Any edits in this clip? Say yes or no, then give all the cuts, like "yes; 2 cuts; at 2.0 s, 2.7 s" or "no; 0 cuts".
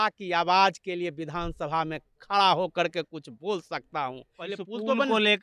yes; 1 cut; at 4.4 s